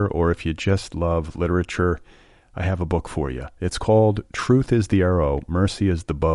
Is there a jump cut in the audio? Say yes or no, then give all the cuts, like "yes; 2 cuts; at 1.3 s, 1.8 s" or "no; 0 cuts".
no; 0 cuts